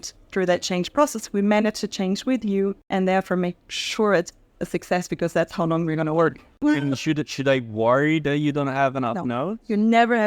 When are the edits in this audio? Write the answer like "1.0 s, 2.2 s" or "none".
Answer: 2.8 s, 6.5 s